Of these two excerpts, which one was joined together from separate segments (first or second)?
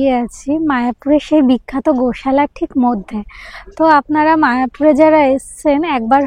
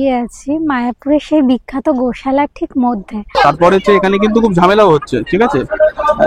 second